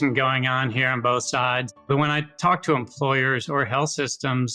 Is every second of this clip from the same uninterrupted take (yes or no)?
yes